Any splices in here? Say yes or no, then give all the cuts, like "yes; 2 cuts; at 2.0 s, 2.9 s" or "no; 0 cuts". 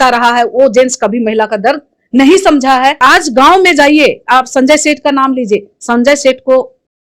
yes; 1 cut; at 3.0 s